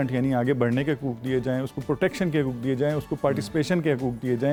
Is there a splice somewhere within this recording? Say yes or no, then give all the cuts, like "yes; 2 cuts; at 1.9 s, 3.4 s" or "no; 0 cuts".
no; 0 cuts